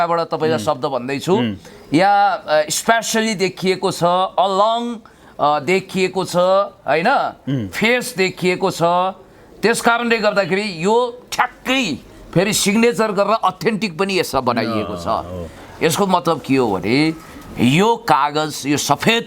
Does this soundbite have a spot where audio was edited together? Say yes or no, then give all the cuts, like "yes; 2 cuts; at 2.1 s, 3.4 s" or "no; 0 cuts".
no; 0 cuts